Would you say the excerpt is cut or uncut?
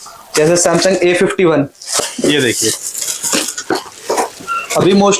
cut